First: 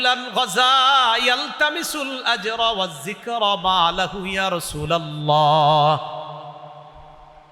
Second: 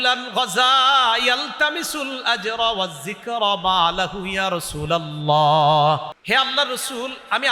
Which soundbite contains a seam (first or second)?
second